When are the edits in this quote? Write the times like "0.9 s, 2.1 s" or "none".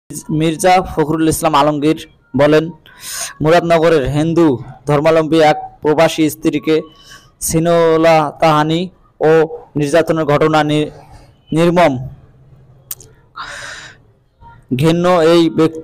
none